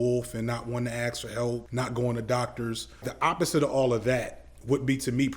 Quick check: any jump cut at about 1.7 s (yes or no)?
yes